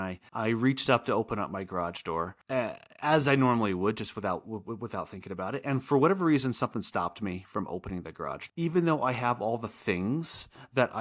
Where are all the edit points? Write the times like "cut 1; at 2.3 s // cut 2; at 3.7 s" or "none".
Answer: cut 1; at 8.5 s